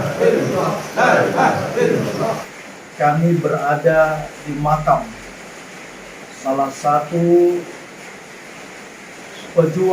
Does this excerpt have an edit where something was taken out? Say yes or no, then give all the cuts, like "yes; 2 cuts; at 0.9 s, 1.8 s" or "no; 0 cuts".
yes; 1 cut; at 2.4 s